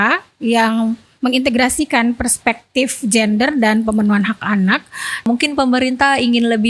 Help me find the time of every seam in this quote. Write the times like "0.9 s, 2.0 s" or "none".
5.3 s